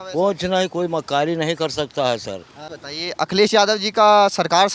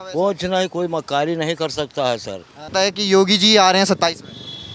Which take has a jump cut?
second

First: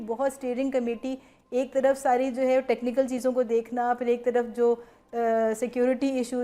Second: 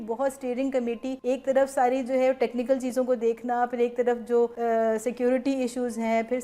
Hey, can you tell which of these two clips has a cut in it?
second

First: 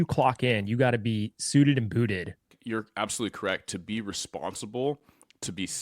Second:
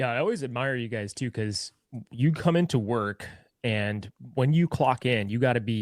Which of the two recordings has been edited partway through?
first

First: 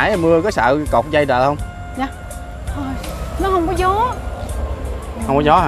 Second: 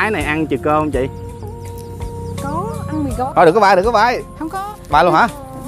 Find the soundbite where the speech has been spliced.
second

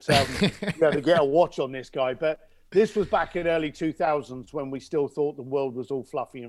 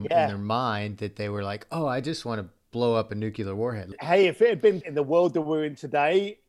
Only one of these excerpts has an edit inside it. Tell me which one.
second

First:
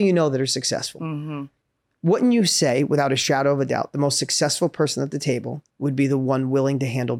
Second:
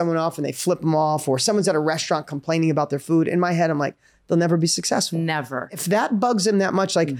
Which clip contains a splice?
second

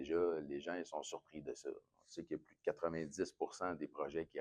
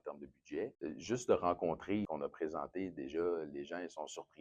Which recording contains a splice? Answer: second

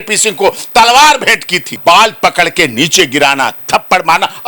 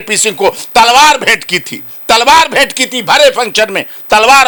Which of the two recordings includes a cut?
first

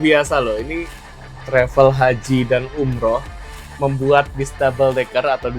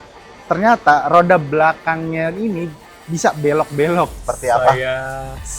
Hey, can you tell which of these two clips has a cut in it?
second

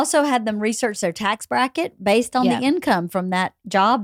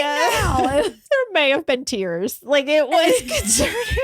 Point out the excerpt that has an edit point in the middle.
second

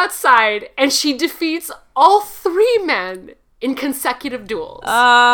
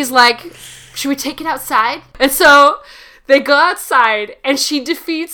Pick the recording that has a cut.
second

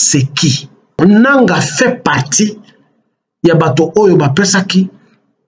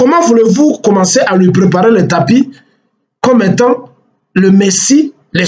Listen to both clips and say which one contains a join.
first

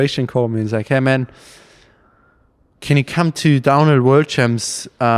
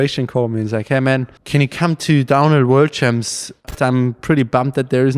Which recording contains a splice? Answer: second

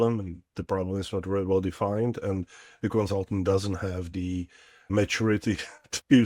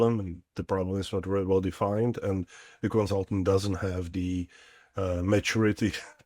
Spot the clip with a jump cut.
first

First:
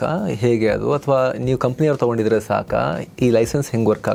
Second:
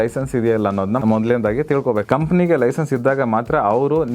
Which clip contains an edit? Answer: second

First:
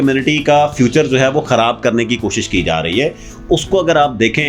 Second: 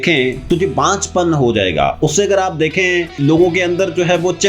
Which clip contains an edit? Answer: second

